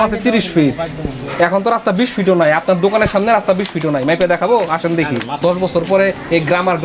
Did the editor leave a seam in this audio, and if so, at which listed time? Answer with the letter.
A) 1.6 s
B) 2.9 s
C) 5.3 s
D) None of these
C